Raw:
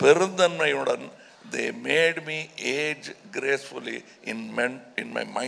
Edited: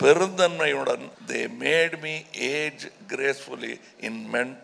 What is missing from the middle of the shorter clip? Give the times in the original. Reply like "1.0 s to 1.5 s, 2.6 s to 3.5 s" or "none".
1.2 s to 1.4 s